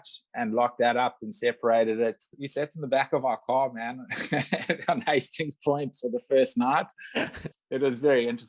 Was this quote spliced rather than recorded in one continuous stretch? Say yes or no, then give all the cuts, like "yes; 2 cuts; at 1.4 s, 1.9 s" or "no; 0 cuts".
yes; 2 cuts; at 2.4 s, 7.5 s